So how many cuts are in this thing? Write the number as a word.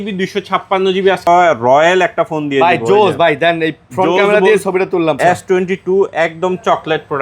two